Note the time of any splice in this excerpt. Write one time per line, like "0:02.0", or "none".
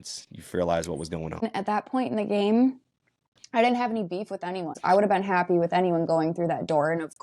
0:01.4
0:04.8